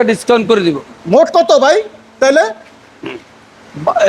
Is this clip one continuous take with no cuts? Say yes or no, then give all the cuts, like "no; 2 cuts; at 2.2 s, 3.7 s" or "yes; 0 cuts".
yes; 0 cuts